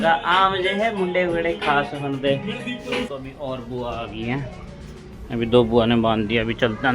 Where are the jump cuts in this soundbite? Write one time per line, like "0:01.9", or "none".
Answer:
0:03.1